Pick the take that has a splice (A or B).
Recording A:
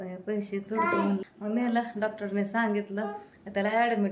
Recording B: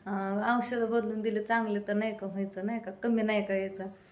A